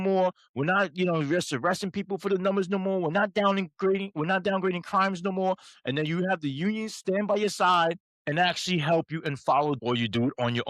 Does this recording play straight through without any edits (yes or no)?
no